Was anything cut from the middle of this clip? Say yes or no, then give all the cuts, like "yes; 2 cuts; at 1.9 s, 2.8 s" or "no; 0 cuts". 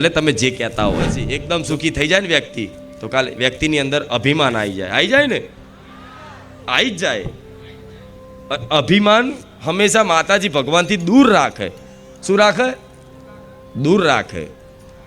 yes; 1 cut; at 1.3 s